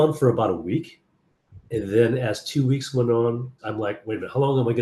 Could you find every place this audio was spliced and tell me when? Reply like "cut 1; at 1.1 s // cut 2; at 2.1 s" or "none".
cut 1; at 3.6 s